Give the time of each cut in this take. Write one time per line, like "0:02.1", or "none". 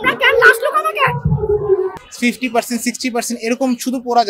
0:01.9